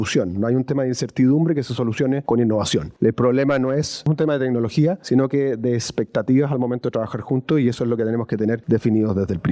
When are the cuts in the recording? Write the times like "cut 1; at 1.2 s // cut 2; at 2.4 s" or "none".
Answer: cut 1; at 2.2 s // cut 2; at 2.9 s // cut 3; at 4.1 s // cut 4; at 5.0 s // cut 5; at 8.6 s